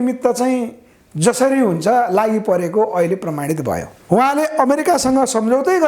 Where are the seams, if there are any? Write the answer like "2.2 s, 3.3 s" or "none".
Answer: 3.9 s